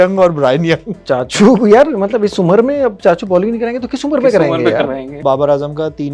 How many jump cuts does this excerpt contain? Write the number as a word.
two